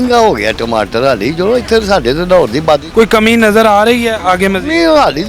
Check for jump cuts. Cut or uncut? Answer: uncut